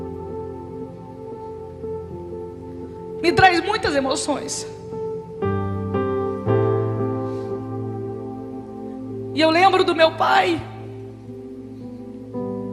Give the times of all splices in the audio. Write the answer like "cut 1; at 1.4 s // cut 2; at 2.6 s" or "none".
none